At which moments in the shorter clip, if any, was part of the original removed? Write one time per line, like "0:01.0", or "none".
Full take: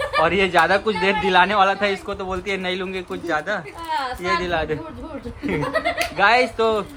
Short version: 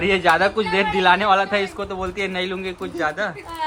none